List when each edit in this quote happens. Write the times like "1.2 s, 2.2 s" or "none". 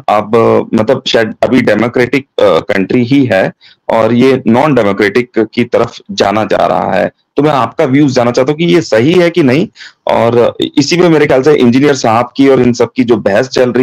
none